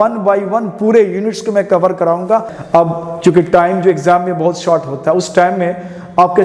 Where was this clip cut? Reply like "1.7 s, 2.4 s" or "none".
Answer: 2.6 s